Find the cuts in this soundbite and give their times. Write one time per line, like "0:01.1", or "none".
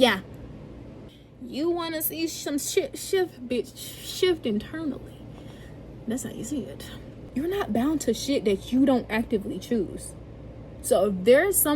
0:00.9
0:07.2